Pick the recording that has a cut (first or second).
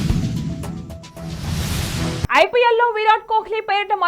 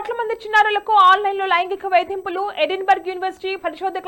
first